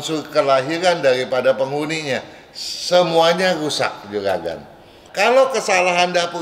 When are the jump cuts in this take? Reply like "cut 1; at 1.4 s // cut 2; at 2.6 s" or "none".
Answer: cut 1; at 5.0 s